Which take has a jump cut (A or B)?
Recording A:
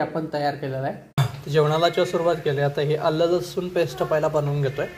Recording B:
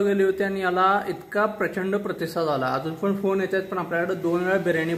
A